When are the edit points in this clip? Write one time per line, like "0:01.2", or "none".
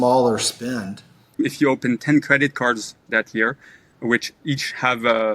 0:01.3